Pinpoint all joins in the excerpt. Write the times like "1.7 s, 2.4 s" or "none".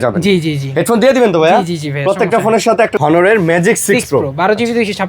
2.9 s